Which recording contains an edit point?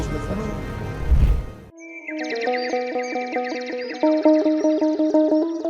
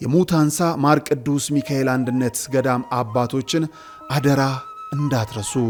first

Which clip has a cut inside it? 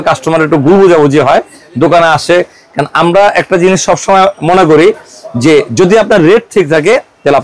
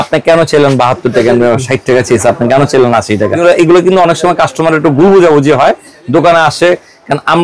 second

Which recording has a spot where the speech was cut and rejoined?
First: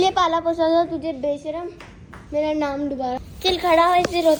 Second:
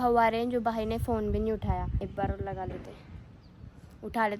second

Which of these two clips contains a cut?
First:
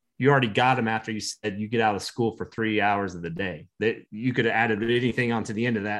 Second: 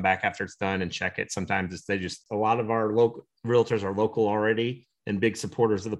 second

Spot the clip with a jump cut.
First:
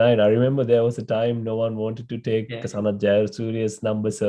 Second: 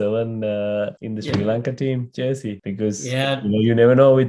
second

